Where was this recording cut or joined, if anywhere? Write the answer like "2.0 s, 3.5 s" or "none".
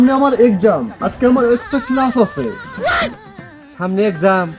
none

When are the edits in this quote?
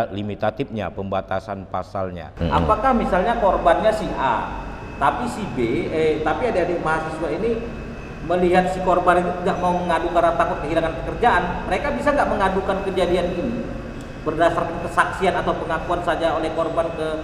2.2 s

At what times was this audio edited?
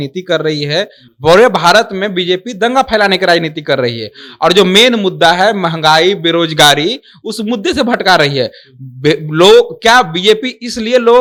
none

